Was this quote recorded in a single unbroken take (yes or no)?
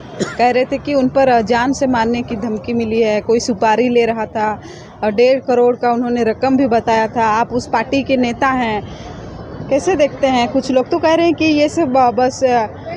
yes